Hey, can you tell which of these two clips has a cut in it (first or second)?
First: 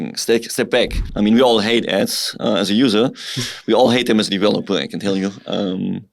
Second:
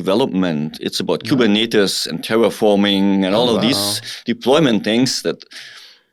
first